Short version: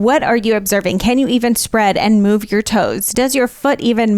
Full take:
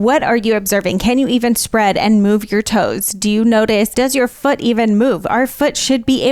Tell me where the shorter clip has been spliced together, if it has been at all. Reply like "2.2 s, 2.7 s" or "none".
3.1 s